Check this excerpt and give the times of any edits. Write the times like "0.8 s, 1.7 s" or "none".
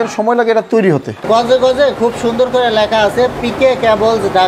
1.2 s